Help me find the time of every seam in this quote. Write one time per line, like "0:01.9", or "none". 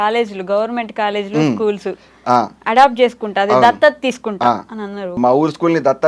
0:05.2